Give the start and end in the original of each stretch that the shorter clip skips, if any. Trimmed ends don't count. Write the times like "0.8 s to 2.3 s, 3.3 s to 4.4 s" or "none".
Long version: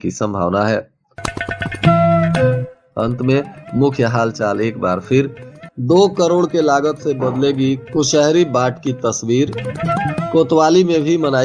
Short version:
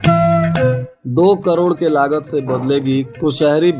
2.7 s to 5.7 s